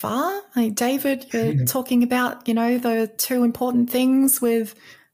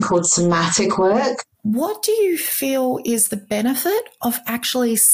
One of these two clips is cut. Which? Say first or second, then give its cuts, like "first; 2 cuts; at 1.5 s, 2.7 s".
second; 1 cut; at 1.5 s